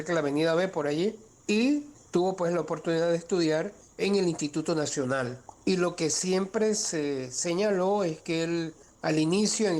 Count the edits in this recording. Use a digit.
5